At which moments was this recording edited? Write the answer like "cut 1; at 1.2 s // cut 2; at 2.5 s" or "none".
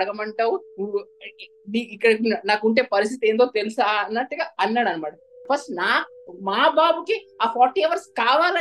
cut 1; at 5.4 s